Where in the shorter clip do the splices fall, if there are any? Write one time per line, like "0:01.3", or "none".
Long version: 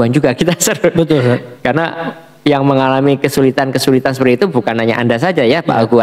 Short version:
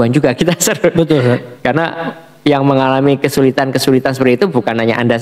none